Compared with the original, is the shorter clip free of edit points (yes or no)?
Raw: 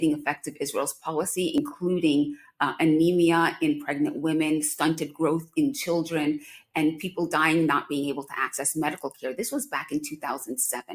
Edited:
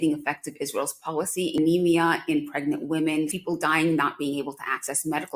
no